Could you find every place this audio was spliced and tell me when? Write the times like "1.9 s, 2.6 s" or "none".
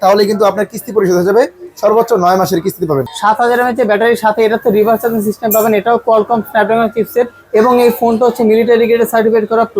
3.1 s